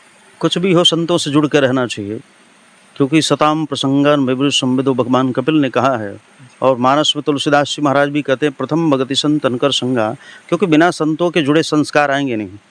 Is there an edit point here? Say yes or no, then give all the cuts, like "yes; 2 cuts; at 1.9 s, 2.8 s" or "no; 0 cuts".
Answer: no; 0 cuts